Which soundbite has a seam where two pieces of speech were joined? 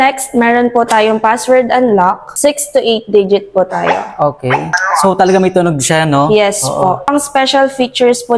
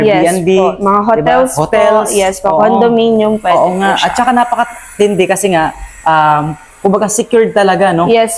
first; 3 cuts; at 2.3 s, 4.7 s, 7.1 s

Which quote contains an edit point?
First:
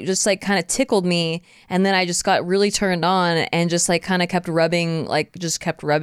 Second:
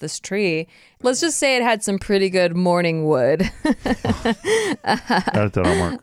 second; 1 cut; at 1.0 s

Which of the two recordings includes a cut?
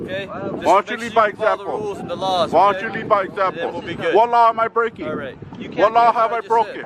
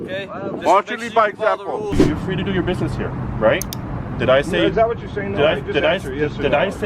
second; 1 cut; at 1.9 s

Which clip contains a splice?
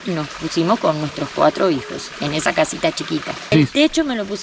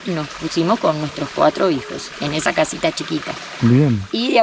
first; 1 cut; at 3.5 s

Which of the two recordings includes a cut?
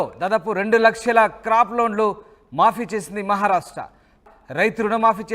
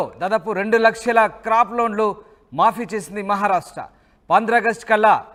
first; 1 cut; at 4.2 s

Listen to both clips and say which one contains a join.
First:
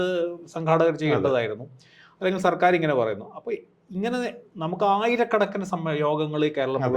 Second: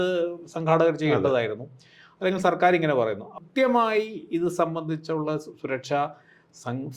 second; 1 cut; at 3.4 s

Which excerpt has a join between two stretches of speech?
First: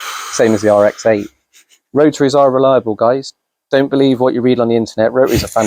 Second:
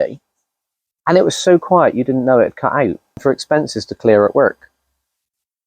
second; 1 cut; at 3.2 s

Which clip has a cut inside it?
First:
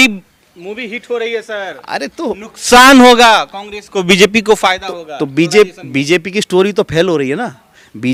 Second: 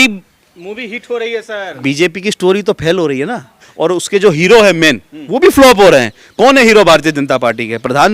second; 2 cuts; at 1.7 s, 3.6 s

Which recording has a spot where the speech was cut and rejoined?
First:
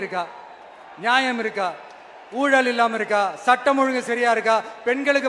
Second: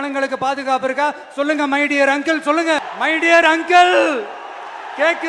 second; 1 cut; at 2.8 s

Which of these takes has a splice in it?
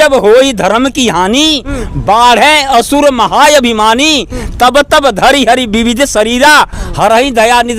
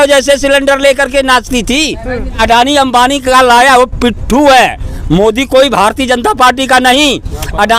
second; 1 cut; at 2.4 s

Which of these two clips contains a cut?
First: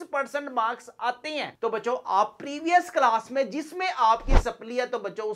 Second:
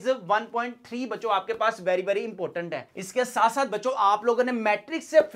second; 1 cut; at 2.9 s

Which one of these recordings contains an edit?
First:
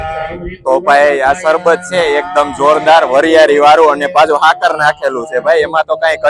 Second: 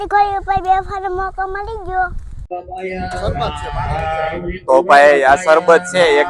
second; 1 cut; at 2.5 s

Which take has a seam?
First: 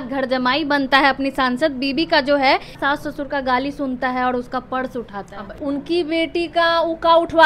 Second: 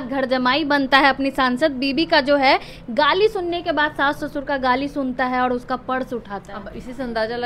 first; 2 cuts; at 2.8 s, 5.6 s

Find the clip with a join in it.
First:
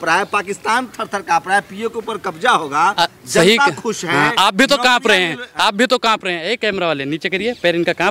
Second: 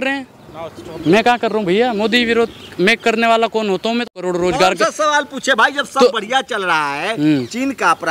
second; 1 cut; at 4.1 s

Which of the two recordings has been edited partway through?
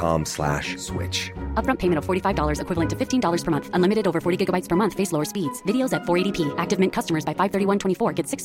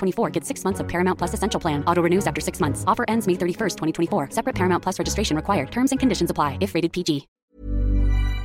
second; 1 cut; at 7.4 s

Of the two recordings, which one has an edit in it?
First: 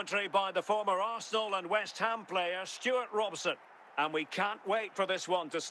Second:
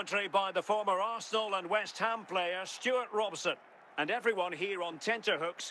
first; 1 cut; at 3.8 s

